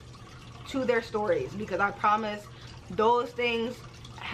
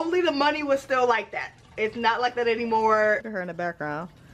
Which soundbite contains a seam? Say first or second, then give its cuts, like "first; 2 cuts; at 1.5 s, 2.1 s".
second; 1 cut; at 3.2 s